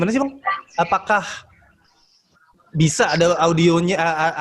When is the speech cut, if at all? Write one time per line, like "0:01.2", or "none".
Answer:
none